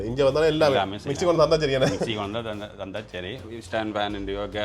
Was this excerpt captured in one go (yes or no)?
no